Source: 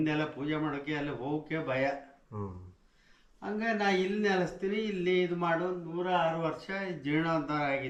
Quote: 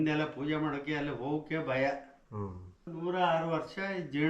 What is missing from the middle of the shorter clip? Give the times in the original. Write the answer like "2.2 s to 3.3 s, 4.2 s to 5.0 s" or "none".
2.9 s to 5.8 s